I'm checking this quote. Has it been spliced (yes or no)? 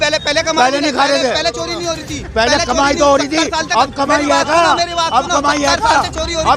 no